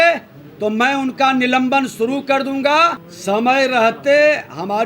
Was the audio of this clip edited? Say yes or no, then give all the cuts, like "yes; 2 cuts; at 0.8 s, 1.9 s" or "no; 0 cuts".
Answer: yes; 1 cut; at 3.1 s